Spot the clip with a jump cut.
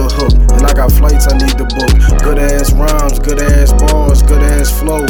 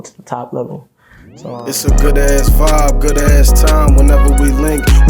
second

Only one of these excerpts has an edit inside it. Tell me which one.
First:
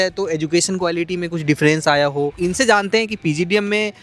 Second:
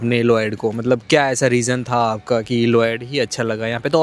first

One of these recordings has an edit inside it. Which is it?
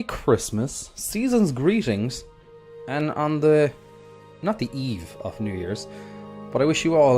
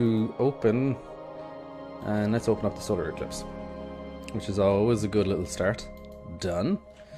first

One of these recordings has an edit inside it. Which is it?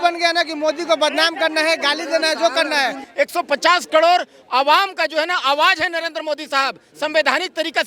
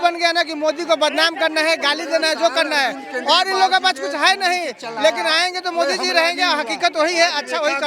first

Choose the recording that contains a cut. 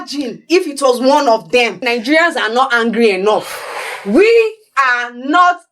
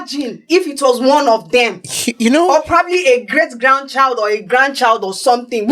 first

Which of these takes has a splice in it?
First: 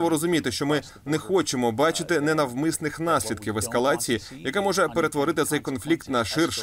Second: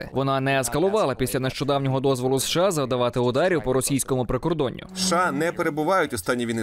second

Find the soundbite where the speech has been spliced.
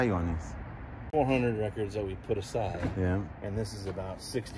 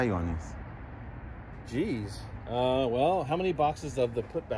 first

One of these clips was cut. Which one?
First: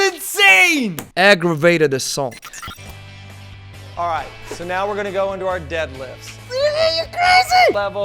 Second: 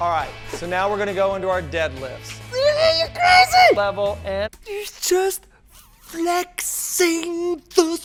first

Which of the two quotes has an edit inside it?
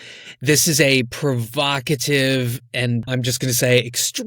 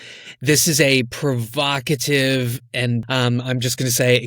first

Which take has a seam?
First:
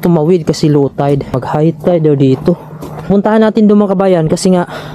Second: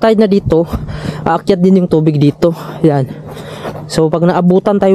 first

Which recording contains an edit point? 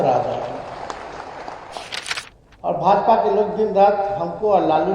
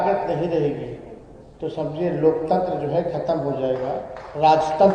first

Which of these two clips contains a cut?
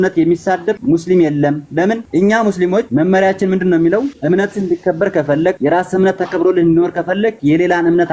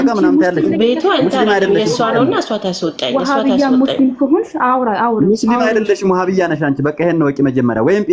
first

